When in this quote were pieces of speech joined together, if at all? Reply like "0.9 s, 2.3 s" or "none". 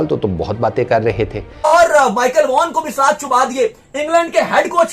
1.7 s